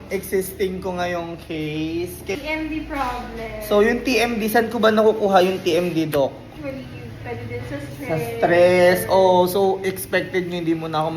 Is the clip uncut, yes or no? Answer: no